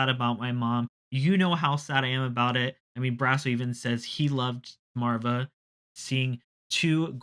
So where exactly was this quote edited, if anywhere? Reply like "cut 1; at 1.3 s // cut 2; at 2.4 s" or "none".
cut 1; at 4.9 s // cut 2; at 5.9 s